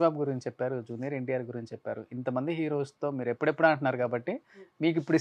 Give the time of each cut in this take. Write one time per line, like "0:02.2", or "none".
none

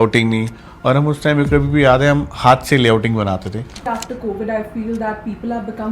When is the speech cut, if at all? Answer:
0:03.8

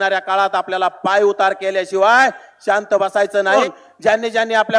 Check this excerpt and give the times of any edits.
0:03.6

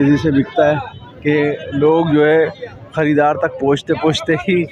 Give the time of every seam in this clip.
none

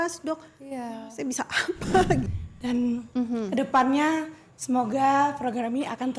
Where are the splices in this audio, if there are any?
0:02.3

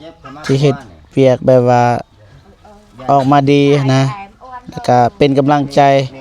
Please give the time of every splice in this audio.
none

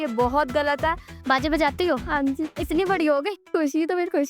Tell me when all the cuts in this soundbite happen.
0:01.1
0:03.4

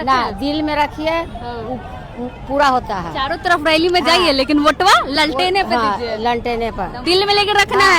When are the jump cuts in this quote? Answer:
0:06.9

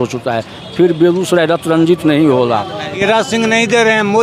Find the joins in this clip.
0:02.9

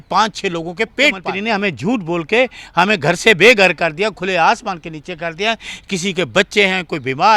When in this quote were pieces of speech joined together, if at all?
0:01.3

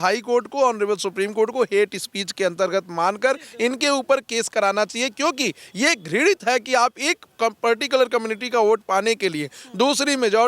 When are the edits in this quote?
none

